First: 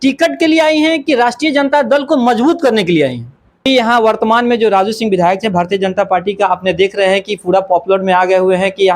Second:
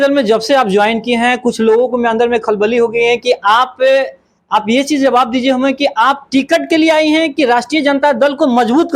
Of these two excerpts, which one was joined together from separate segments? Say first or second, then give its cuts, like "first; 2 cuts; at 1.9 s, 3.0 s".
first; 1 cut; at 3.7 s